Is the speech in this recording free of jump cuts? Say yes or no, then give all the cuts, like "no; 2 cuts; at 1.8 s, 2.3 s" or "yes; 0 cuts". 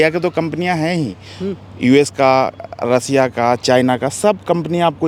yes; 0 cuts